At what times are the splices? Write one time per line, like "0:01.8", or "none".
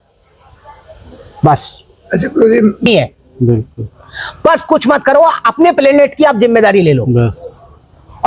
0:02.9